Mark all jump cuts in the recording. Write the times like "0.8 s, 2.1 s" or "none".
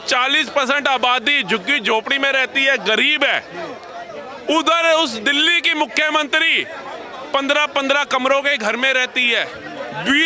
none